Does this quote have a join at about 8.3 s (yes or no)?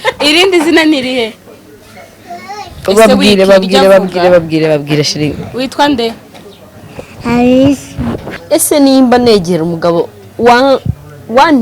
yes